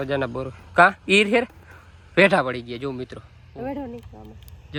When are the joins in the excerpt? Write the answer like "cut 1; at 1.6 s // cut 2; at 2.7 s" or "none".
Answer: none

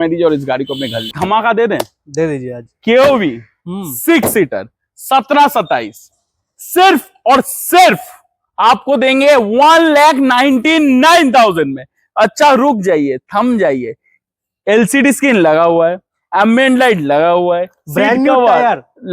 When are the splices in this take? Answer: cut 1; at 1.1 s

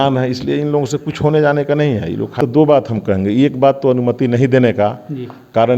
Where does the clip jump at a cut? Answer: cut 1; at 2.4 s

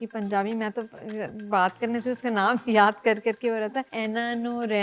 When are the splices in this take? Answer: cut 1; at 3.9 s

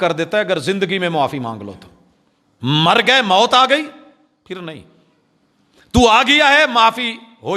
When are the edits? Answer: none

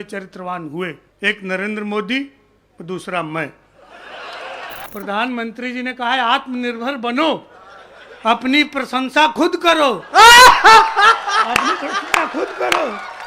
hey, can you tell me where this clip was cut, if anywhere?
cut 1; at 1.1 s // cut 2; at 4.9 s

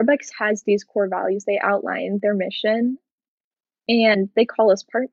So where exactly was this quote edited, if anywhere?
none

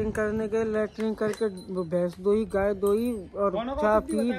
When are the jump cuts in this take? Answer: none

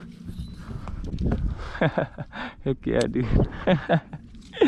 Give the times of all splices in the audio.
cut 1; at 1.1 s

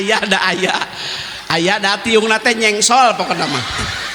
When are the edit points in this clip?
none

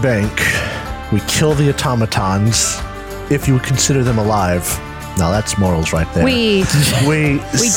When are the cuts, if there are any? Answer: none

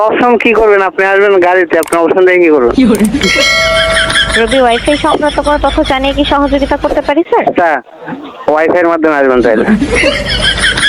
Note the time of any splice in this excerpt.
none

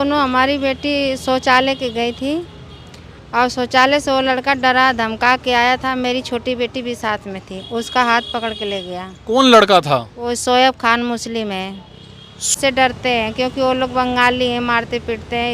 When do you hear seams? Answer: cut 1; at 12.5 s

